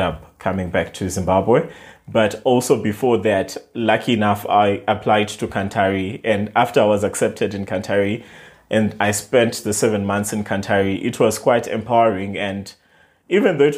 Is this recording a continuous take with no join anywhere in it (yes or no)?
yes